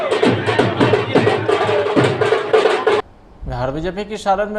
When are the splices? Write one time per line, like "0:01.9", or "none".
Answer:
0:03.2